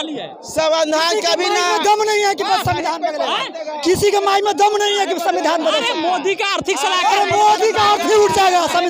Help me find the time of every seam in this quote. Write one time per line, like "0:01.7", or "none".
none